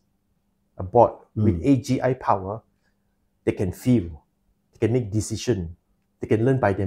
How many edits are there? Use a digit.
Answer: 0